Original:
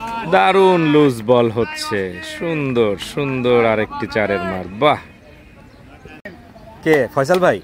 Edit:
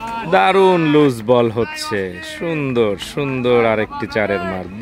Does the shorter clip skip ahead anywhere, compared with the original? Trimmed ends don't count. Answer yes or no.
no